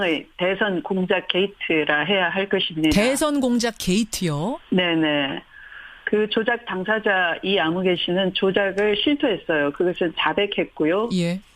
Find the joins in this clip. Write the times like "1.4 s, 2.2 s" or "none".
none